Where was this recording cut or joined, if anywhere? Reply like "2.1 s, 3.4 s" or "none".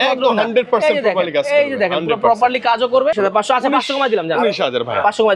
3.2 s